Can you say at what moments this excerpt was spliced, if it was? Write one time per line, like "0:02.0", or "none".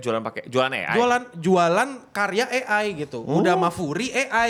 none